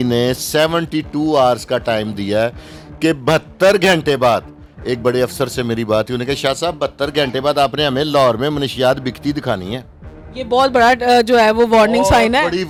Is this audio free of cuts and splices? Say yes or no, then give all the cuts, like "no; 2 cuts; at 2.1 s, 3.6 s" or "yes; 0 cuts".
yes; 0 cuts